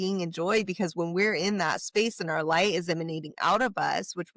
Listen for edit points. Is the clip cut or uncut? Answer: uncut